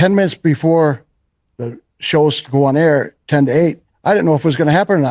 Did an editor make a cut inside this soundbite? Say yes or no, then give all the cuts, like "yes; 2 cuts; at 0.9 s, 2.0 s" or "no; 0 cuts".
yes; 1 cut; at 3.9 s